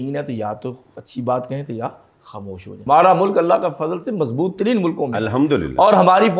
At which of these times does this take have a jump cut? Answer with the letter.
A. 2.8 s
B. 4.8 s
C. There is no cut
A